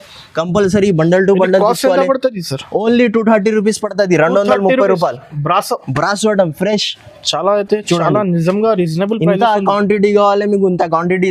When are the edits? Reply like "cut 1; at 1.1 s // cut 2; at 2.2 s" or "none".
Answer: none